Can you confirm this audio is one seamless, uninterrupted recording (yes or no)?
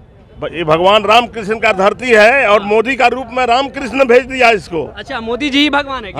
yes